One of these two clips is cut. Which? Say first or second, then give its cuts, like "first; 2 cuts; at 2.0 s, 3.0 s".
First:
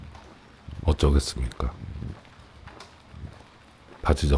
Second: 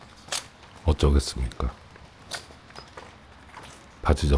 first; 2 cuts; at 1.8 s, 3.7 s